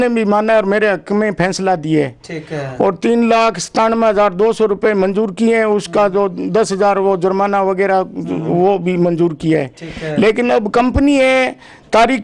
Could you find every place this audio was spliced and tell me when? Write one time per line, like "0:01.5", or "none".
none